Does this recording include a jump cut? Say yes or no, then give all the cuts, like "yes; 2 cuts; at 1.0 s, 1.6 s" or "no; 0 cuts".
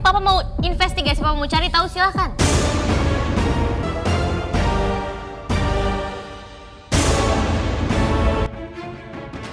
yes; 2 cuts; at 3.8 s, 8.5 s